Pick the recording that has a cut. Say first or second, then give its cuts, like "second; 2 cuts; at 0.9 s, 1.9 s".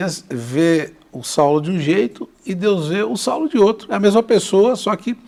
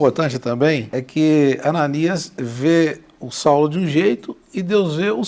second; 1 cut; at 0.9 s